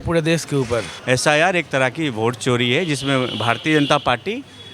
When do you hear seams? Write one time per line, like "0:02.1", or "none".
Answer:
0:00.9